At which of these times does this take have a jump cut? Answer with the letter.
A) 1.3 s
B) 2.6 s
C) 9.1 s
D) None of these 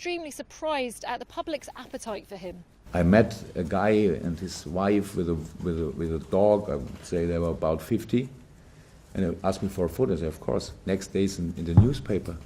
A